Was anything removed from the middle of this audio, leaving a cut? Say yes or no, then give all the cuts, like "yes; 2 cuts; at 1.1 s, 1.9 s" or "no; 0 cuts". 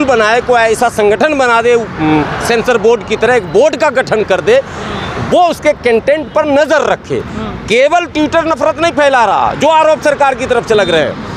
no; 0 cuts